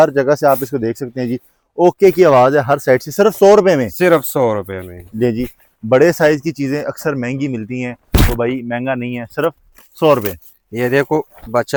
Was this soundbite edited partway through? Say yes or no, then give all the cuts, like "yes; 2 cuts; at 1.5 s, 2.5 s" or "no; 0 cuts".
no; 0 cuts